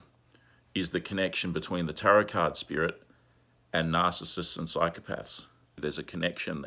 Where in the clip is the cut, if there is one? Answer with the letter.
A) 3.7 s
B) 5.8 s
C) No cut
B